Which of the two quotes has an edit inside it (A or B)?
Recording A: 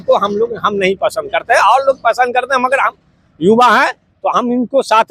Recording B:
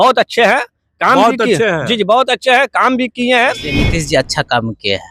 B